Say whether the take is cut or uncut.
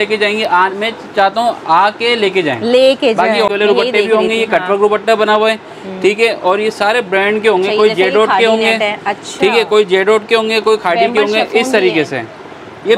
cut